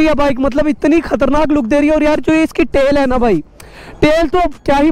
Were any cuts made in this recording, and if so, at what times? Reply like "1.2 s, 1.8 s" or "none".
none